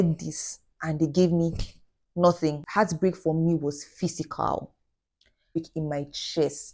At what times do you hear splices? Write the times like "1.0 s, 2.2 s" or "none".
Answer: 5.6 s